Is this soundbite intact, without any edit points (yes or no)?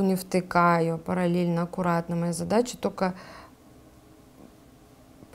no